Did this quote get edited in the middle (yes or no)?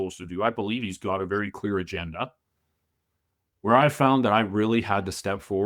yes